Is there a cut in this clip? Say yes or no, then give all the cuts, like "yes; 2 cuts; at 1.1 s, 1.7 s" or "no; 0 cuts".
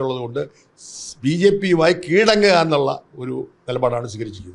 no; 0 cuts